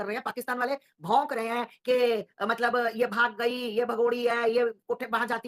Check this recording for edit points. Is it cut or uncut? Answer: uncut